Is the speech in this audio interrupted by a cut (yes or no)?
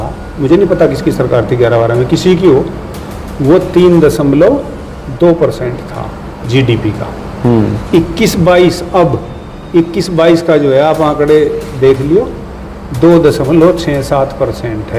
no